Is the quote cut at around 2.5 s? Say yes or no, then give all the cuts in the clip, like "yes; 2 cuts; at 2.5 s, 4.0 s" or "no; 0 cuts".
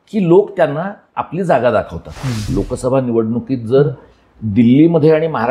yes; 1 cut; at 2.5 s